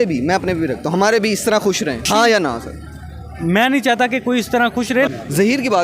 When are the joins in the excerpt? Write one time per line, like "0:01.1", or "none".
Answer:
0:02.1
0:05.1